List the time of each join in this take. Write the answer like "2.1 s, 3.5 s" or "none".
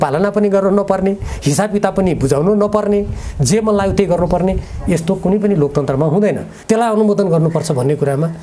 6.5 s